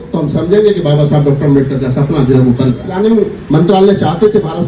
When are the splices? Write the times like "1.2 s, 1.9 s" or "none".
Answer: 2.9 s